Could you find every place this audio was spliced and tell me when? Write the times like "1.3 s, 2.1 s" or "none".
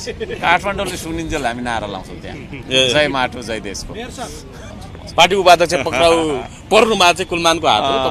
4.6 s